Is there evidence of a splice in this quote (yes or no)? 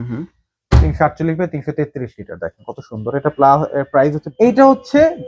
yes